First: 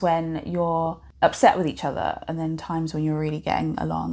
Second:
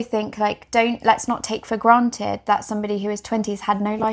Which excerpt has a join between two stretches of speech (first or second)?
first